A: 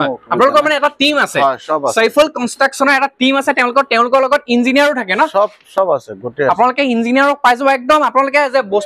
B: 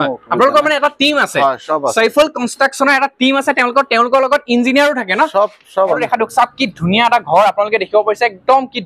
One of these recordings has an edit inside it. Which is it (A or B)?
B